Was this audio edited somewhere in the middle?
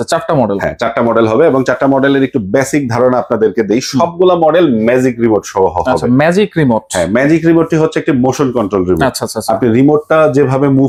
no; 0 cuts

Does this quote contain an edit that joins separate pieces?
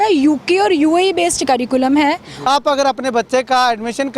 yes; 1 cut; at 2.5 s

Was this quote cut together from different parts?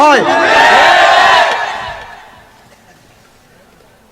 no; 0 cuts

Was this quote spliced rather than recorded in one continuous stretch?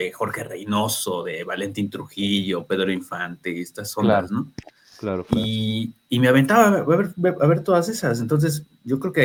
no; 0 cuts

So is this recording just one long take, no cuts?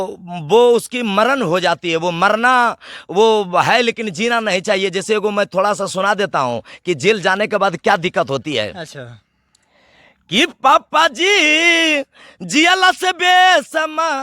yes; 0 cuts

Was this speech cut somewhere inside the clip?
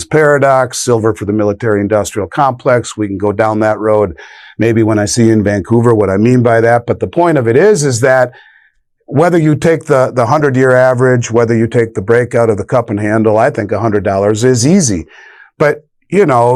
no; 0 cuts

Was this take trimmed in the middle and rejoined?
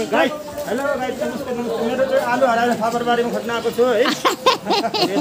no; 0 cuts

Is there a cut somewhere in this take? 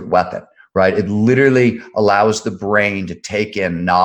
no; 0 cuts

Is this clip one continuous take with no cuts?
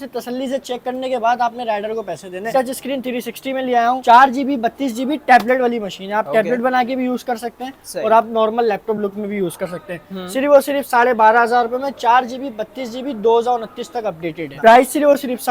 yes; 0 cuts

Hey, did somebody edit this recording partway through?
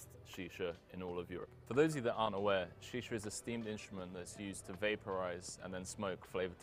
yes; 1 cut; at 1.4 s

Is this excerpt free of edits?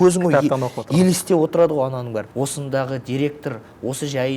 no; 1 cut; at 2.3 s

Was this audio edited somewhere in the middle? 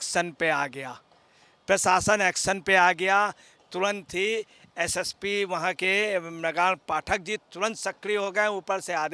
no; 0 cuts

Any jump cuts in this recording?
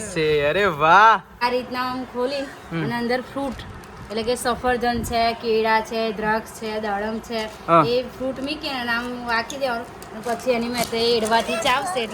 yes; 1 cut; at 1.4 s

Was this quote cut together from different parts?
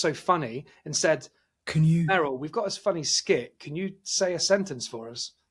no; 0 cuts

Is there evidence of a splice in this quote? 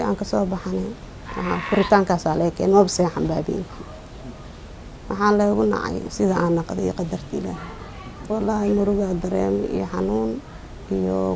no; 0 cuts

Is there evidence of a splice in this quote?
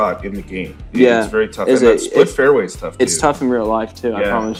no; 0 cuts

